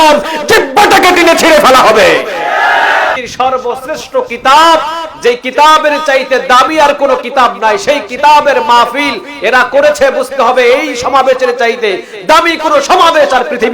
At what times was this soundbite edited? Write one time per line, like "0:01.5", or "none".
0:03.2